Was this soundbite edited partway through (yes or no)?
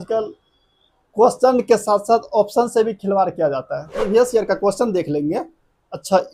yes